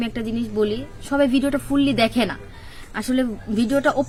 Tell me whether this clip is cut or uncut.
uncut